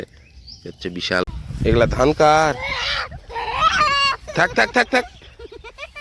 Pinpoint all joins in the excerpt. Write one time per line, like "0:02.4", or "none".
0:01.2